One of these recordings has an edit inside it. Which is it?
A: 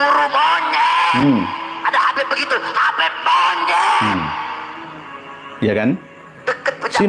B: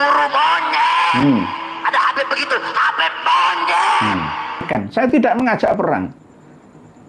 B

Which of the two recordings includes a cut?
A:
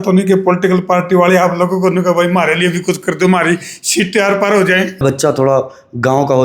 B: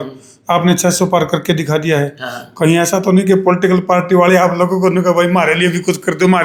A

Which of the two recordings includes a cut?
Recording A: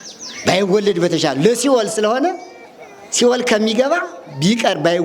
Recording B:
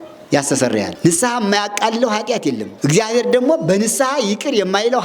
B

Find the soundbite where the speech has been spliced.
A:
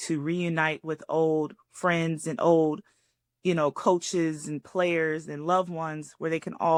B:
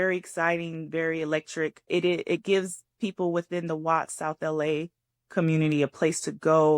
B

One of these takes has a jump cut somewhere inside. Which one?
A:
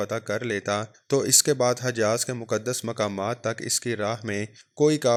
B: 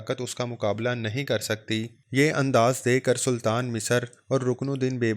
B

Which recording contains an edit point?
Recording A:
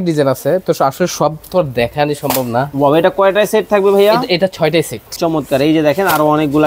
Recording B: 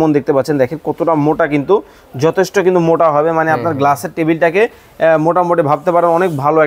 A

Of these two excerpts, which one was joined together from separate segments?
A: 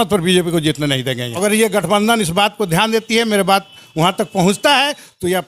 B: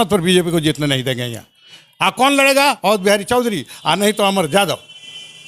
A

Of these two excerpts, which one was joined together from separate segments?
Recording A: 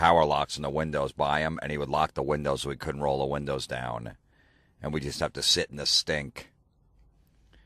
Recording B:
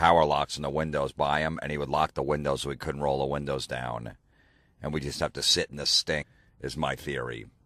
A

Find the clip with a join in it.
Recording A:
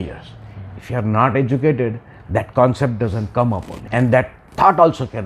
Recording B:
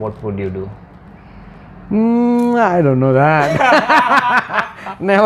A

